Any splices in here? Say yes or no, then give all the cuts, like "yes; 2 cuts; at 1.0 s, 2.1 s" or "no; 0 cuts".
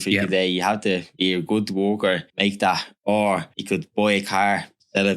yes; 3 cuts; at 1.1 s, 2.3 s, 3.5 s